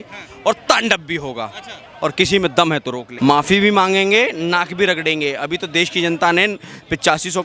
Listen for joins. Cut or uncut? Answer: cut